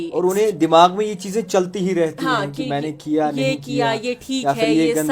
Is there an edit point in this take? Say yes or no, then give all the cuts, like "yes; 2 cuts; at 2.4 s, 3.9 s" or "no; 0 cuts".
no; 0 cuts